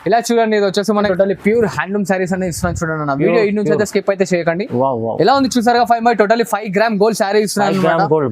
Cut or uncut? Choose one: cut